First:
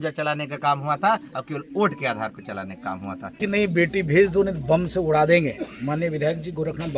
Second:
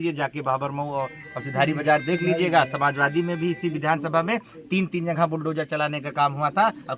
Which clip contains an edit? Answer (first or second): first